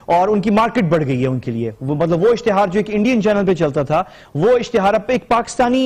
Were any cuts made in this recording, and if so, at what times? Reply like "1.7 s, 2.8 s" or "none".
none